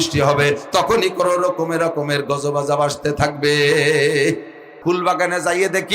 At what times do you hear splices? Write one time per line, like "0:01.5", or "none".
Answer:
0:04.7